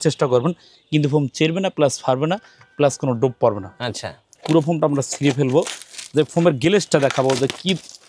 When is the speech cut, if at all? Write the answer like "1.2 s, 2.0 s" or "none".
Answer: 4.3 s